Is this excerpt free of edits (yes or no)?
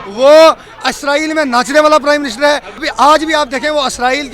no